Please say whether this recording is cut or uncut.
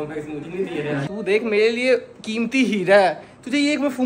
cut